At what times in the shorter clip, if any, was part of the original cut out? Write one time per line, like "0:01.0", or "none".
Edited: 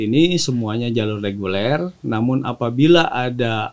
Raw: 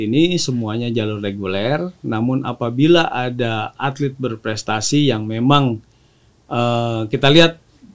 none

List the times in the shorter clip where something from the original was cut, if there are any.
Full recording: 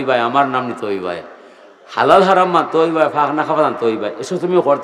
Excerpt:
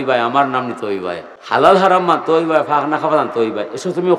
0:01.3

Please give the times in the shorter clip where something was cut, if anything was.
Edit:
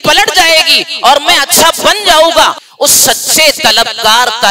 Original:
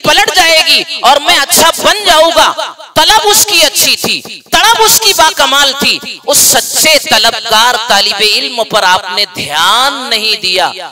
0:02.6

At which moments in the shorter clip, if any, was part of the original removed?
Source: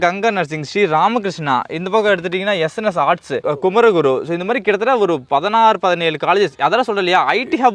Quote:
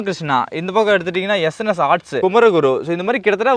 0:02.2

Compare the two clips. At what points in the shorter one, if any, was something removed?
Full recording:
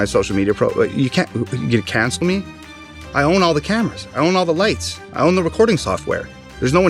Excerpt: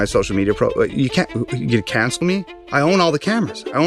0:02.6

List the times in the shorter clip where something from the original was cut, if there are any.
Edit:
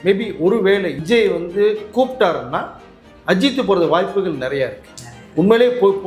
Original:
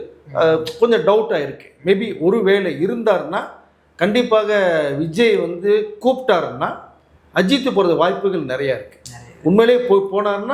0:01.0

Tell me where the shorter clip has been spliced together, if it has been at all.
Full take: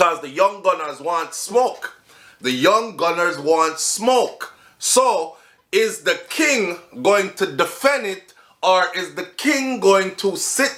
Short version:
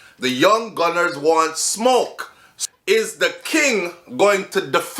0:02.5

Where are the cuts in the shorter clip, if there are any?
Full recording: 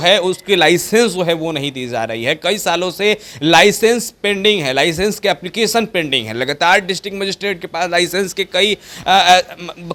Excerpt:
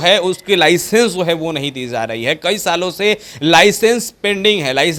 none

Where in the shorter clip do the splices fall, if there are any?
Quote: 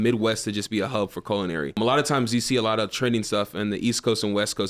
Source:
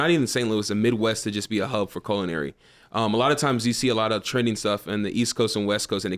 0:01.8

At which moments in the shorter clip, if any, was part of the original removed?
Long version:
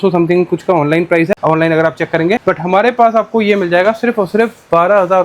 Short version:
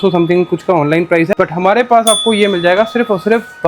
0:01.4

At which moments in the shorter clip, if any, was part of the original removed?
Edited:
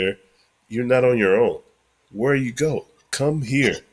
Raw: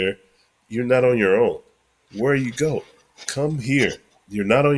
0:03.0

